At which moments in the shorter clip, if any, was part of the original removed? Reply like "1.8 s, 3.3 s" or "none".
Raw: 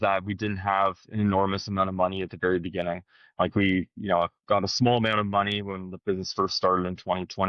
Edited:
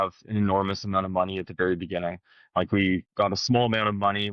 3.1 s